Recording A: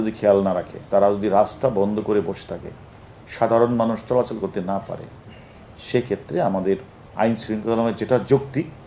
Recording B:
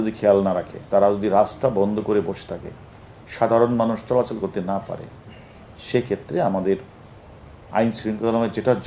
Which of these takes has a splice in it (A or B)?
A